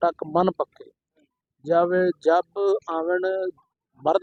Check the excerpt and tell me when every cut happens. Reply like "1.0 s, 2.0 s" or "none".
none